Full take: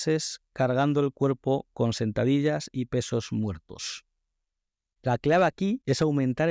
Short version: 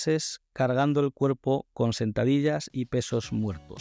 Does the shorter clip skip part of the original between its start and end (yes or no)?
no